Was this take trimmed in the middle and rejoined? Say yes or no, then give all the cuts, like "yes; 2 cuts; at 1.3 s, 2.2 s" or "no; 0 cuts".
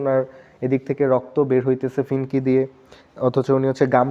no; 0 cuts